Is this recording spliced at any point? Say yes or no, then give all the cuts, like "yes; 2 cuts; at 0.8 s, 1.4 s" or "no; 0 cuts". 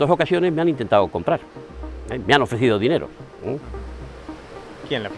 no; 0 cuts